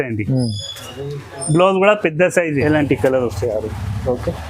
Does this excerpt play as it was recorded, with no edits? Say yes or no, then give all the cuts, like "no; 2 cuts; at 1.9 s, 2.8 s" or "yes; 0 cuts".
no; 1 cut; at 2.6 s